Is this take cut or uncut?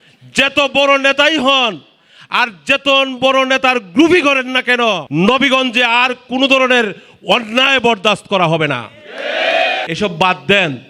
cut